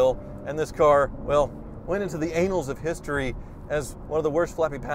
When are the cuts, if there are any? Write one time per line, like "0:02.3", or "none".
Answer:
none